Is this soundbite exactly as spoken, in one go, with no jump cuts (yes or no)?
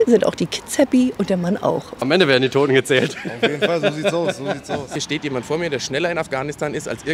no